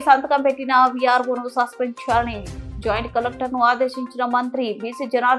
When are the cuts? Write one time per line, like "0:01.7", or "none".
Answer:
none